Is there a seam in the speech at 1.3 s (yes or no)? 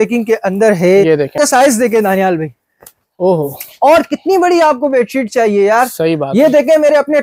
yes